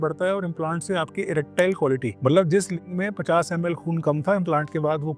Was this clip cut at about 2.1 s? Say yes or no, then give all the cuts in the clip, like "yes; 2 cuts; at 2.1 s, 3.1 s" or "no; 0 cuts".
yes; 1 cut; at 2.1 s